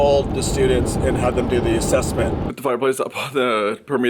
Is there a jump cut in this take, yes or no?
yes